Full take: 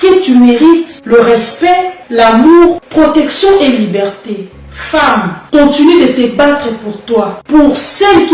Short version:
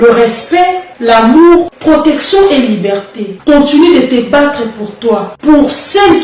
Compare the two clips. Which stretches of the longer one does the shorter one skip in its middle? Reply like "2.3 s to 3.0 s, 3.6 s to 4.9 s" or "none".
4.4 s to 5.4 s